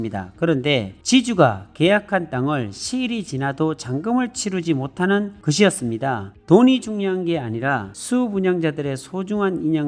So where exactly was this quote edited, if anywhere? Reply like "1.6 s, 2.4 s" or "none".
6.3 s